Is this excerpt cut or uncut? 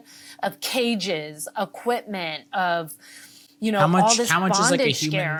uncut